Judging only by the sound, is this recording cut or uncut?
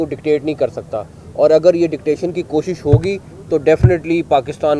uncut